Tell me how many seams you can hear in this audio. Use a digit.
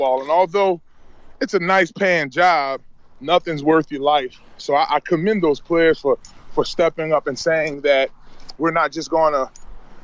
0